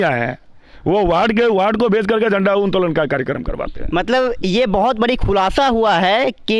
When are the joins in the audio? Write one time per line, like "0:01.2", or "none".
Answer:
none

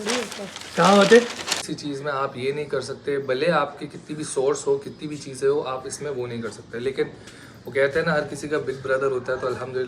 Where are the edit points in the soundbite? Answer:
0:01.6

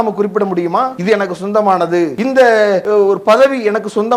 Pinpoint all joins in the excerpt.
0:01.0
0:02.1
0:02.8

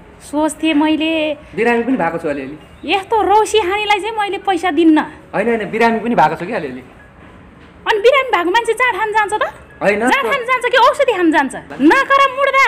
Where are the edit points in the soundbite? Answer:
0:11.6

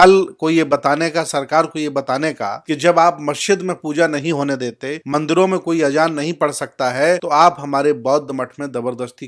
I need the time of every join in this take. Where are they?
0:02.5
0:04.9
0:07.2

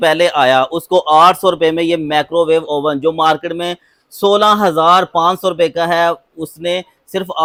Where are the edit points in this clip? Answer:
none

